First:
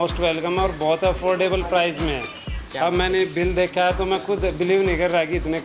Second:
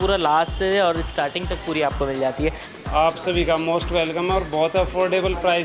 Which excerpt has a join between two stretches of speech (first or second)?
second